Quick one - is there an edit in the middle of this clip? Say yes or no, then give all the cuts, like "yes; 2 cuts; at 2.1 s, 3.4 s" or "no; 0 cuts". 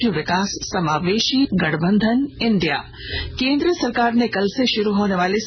yes; 1 cut; at 1.5 s